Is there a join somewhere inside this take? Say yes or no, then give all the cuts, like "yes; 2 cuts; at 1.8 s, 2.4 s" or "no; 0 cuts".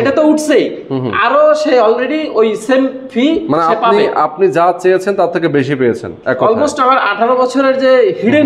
no; 0 cuts